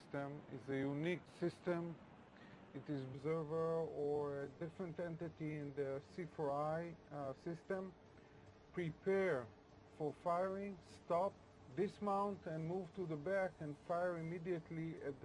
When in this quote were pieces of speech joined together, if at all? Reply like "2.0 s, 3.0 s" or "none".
none